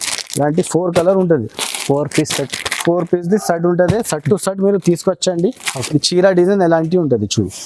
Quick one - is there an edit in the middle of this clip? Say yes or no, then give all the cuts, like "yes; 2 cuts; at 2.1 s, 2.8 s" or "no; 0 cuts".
yes; 1 cut; at 5.7 s